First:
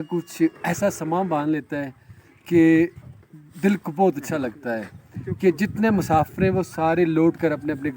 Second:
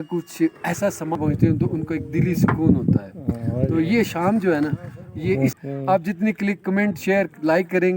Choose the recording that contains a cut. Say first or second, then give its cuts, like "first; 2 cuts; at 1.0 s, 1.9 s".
second; 2 cuts; at 1.2 s, 5.6 s